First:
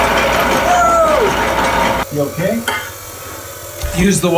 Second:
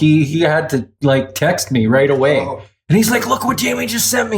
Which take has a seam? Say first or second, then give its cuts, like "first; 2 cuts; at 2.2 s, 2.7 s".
first; 1 cut; at 2.0 s